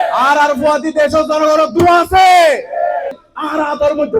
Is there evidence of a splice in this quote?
yes; 1 cut; at 3.2 s

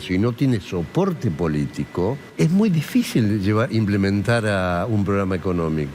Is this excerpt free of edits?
no; 1 cut; at 2.2 s

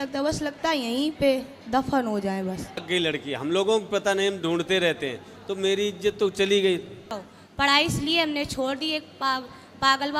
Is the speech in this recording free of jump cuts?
no; 2 cuts; at 2.8 s, 7.1 s

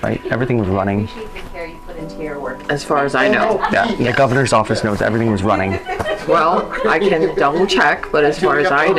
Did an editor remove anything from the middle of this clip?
yes; 1 cut; at 3.7 s

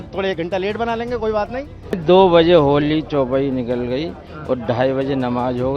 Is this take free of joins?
no; 1 cut; at 2.0 s

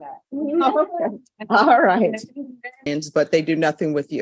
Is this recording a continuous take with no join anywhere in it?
no; 1 cut; at 2.9 s

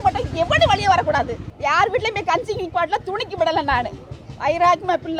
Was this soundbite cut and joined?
yes; 1 cut; at 1.4 s

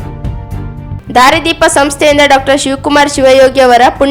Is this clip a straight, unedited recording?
no; 1 cut; at 1.0 s

